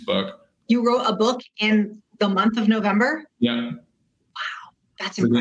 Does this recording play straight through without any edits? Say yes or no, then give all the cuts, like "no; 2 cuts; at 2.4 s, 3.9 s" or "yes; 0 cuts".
yes; 0 cuts